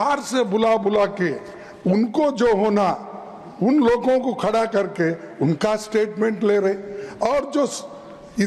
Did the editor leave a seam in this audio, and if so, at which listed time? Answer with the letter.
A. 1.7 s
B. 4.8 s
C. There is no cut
C